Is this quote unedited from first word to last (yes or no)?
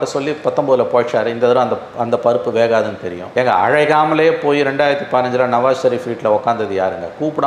yes